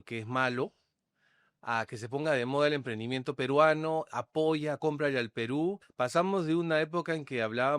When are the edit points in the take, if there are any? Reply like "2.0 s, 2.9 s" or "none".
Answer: 5.9 s